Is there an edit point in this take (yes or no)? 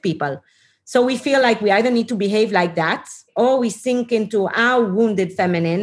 no